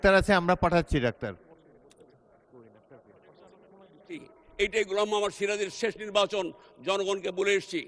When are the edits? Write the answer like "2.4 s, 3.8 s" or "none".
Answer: 4.4 s